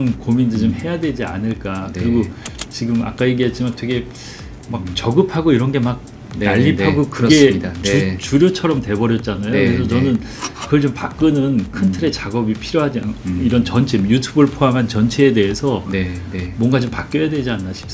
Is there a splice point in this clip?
no; 0 cuts

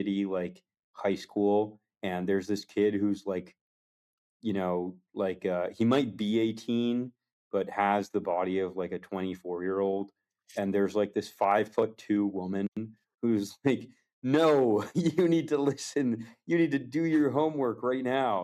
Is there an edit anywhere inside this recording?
no; 0 cuts

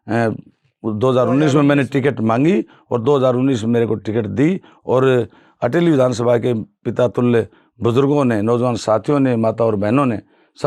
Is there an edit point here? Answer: no; 0 cuts

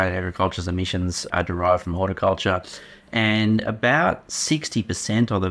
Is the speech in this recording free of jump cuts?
no; 1 cut; at 1.2 s

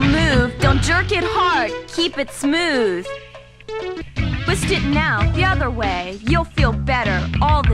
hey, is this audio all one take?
no; 1 cut; at 3.9 s

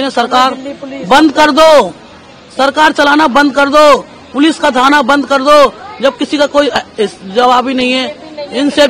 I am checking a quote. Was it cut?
no; 0 cuts

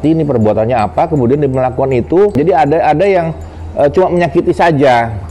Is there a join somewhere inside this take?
yes; 1 cut; at 2.3 s

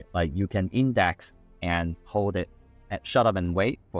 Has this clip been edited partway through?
no; 0 cuts

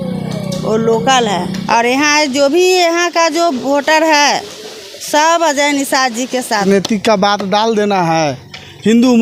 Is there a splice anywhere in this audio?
yes; 2 cuts; at 1.6 s, 6.6 s

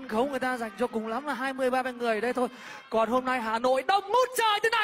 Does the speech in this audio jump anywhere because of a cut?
no; 0 cuts

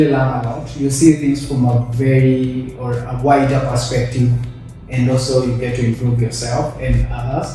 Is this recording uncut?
yes; 0 cuts

